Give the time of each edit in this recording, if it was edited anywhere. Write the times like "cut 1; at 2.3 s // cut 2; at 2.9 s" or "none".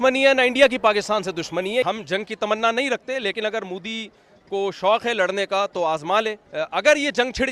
cut 1; at 1.8 s // cut 2; at 6.4 s